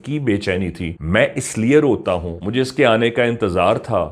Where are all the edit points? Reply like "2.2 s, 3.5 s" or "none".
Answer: 0.9 s, 2.4 s